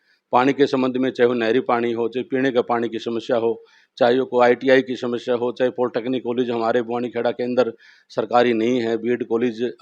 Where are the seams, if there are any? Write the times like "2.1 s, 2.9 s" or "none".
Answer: none